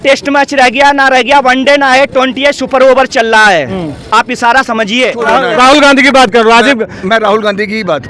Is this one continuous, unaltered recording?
no; 1 cut; at 5.2 s

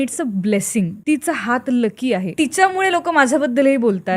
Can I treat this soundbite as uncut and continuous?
no; 2 cuts; at 1.0 s, 2.3 s

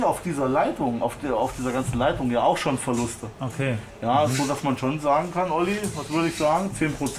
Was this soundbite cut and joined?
no; 0 cuts

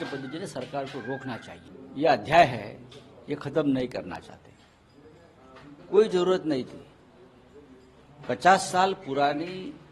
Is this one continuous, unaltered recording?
no; 1 cut; at 1.5 s

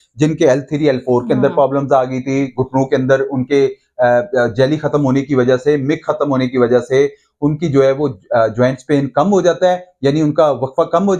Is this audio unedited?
yes; 0 cuts

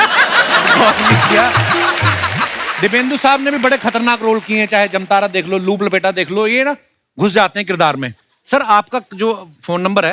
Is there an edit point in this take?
yes; 1 cut; at 2.6 s

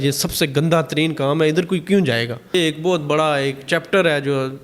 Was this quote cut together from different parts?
yes; 1 cut; at 2.5 s

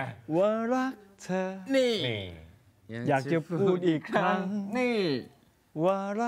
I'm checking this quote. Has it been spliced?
no; 0 cuts

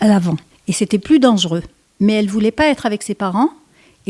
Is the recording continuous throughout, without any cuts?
no; 1 cut; at 1.0 s

